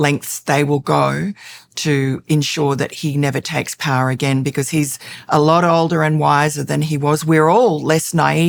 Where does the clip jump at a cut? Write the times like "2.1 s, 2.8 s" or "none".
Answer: none